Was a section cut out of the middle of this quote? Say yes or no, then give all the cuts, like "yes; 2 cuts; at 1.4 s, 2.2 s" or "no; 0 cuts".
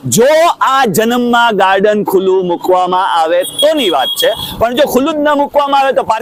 no; 0 cuts